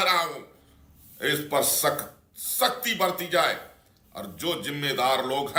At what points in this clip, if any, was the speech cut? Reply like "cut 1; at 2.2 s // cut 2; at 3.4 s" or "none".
none